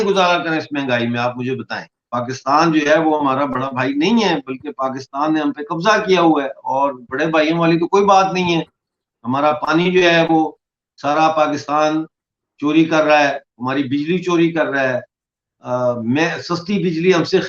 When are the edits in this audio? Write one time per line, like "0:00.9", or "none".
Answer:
0:02.1